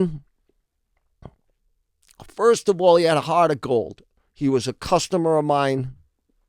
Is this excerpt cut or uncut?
uncut